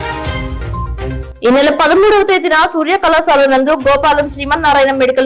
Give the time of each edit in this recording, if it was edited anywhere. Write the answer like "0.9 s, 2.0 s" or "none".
1.2 s